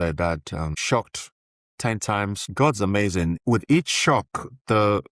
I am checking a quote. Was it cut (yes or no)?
yes